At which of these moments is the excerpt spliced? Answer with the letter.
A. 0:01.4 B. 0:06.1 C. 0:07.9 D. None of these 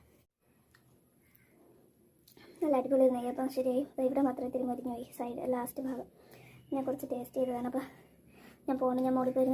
D